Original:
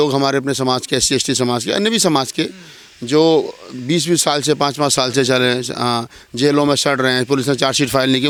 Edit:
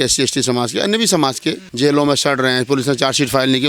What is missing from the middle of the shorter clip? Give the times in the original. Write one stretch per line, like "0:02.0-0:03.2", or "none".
0:02.6-0:06.3